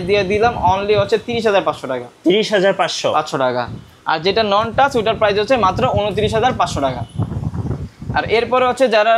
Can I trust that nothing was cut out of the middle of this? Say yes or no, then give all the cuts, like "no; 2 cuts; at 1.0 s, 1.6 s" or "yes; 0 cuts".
yes; 0 cuts